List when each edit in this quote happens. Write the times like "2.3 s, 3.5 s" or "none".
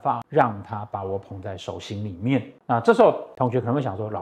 3.3 s